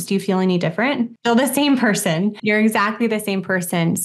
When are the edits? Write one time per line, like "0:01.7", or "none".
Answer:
0:01.1
0:02.4